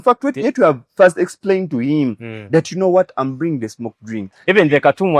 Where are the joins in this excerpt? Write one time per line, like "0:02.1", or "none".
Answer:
0:04.3